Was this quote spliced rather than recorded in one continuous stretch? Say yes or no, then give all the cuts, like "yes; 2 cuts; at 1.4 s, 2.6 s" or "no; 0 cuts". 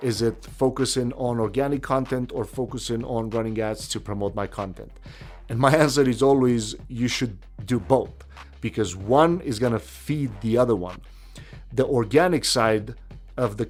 no; 0 cuts